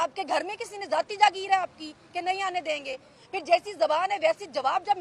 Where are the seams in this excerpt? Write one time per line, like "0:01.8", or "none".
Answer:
none